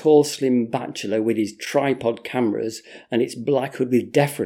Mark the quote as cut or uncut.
uncut